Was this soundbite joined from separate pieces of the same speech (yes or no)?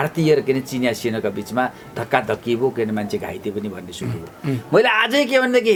no